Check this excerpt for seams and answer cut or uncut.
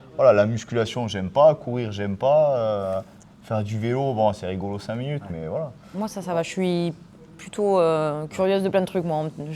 uncut